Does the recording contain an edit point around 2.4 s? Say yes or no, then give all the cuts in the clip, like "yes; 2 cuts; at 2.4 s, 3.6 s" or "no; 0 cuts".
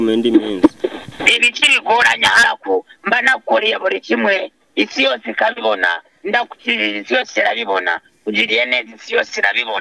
yes; 1 cut; at 2.4 s